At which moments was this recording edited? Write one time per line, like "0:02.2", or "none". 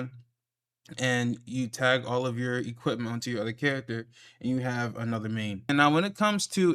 0:05.7